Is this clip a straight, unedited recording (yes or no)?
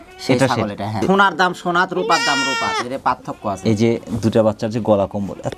no